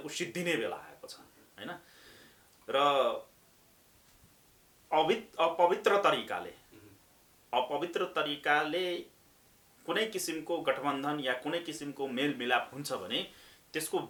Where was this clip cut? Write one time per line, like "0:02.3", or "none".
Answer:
none